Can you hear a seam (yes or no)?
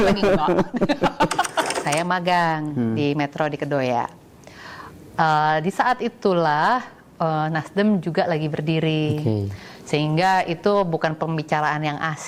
yes